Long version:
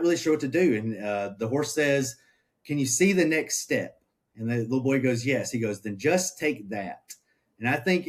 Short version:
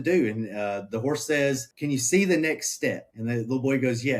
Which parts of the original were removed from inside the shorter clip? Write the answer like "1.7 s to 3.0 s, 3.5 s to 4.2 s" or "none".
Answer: 2.2 s to 2.6 s, 4.0 s to 4.3 s